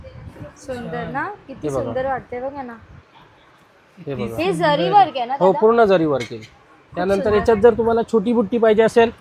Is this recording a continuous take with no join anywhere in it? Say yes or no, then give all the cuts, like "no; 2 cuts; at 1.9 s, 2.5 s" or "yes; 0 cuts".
yes; 0 cuts